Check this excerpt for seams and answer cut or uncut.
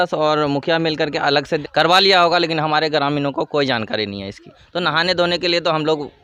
cut